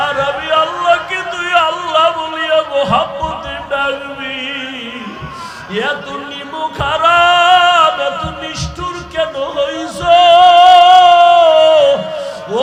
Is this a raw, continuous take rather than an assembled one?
yes; 0 cuts

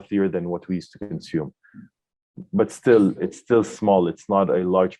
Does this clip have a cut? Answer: no; 0 cuts

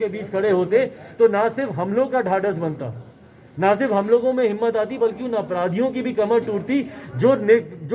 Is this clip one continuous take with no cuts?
yes; 0 cuts

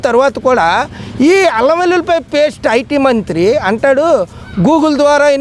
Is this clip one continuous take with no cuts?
yes; 0 cuts

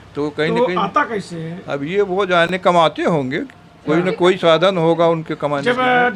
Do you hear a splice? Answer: no; 0 cuts

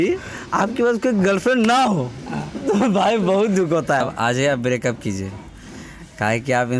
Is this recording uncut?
no; 1 cut; at 4.0 s

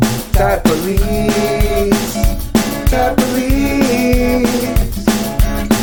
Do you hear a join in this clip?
no; 0 cuts

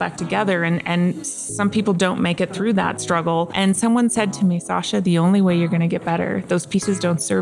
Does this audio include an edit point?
yes; 1 cut; at 3.5 s

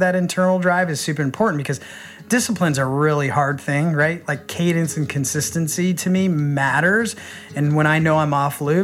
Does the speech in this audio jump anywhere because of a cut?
yes; 1 cut; at 1.3 s

